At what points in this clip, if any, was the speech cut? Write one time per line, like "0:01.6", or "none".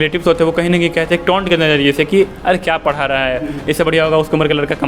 none

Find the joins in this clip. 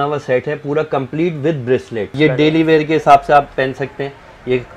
0:02.1

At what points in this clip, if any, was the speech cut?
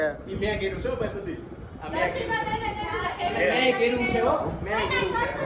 none

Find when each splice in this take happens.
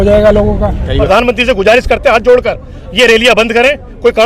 0:01.0

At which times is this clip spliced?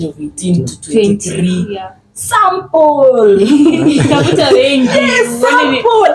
none

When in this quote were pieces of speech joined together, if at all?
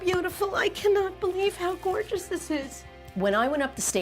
none

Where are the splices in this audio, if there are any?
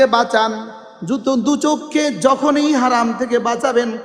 none

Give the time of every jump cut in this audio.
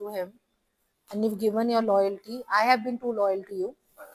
none

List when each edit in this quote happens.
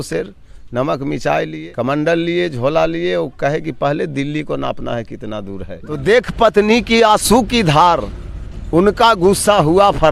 0:01.6
0:06.0

